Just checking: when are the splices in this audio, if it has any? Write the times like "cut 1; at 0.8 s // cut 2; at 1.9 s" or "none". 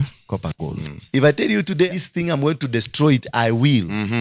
cut 1; at 1.0 s